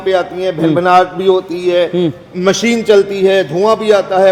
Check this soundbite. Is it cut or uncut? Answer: uncut